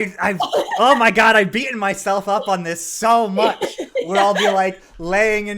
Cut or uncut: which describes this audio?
uncut